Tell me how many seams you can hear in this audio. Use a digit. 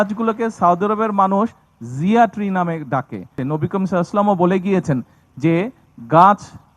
1